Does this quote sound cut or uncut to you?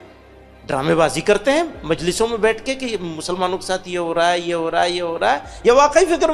uncut